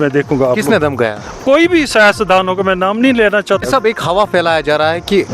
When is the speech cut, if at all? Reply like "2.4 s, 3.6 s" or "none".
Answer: 3.6 s